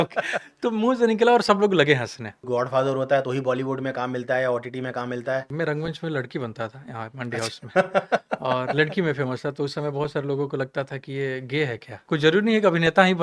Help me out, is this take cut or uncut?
cut